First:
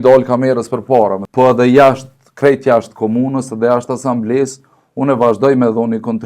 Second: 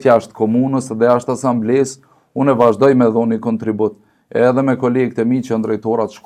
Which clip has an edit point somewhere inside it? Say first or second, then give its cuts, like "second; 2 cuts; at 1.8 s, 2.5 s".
first; 1 cut; at 1.2 s